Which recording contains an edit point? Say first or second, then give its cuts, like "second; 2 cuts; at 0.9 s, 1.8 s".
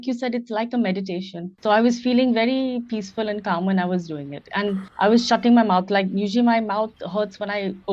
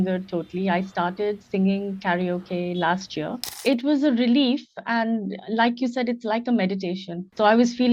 second; 1 cut; at 3.5 s